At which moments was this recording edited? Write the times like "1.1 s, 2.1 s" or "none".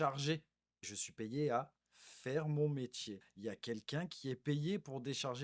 1.0 s, 3.2 s